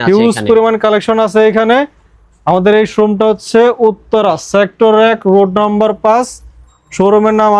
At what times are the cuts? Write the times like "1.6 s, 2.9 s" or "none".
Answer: none